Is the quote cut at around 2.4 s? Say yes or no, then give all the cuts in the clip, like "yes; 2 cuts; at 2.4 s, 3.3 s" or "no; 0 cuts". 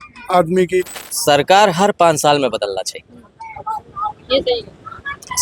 no; 1 cut; at 1.0 s